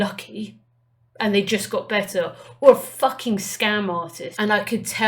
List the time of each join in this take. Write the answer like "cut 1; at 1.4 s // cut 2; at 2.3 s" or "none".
cut 1; at 4.2 s

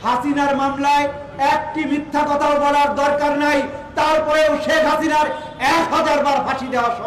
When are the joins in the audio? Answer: none

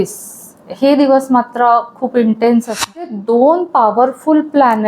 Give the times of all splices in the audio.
cut 1; at 3.0 s

